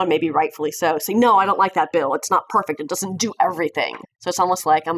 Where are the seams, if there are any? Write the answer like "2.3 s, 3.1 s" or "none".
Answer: 4.0 s